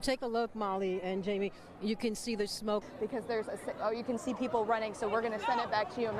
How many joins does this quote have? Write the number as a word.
one